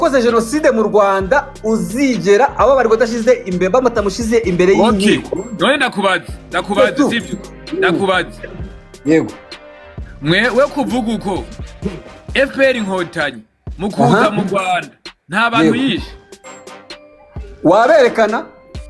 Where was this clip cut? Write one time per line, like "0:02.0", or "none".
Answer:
none

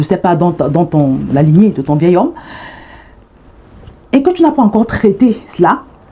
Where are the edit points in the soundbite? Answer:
none

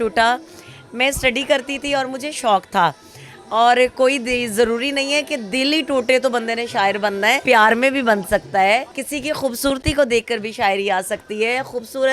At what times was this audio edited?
0:07.4
0:09.0

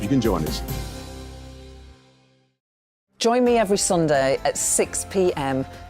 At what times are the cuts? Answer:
0:02.8

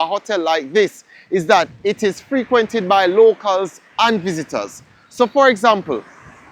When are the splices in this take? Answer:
none

